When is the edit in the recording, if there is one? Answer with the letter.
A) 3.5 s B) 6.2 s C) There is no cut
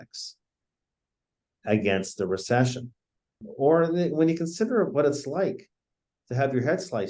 A